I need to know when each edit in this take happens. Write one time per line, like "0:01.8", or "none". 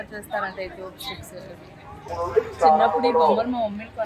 0:02.1